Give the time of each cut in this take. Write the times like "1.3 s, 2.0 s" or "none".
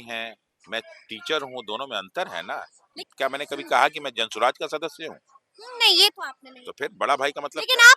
3.0 s